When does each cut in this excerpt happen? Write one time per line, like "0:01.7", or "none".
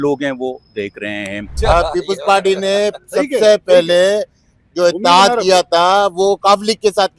0:01.6

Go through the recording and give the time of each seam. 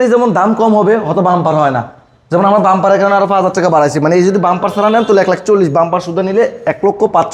none

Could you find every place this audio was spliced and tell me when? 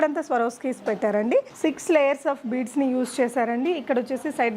0:01.5

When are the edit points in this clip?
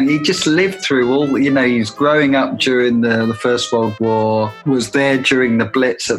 0:04.6

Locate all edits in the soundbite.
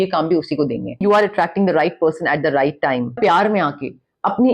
0:01.0
0:03.2

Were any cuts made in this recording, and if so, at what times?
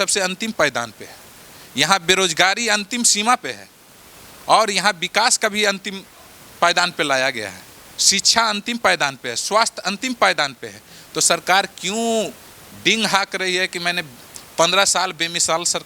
none

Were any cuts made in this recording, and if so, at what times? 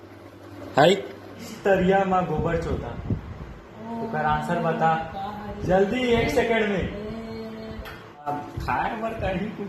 0:01.5
0:08.3

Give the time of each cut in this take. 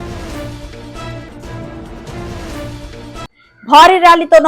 0:03.3

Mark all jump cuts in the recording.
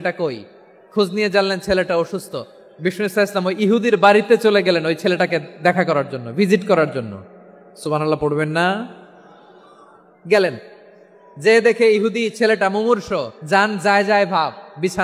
0:13.4

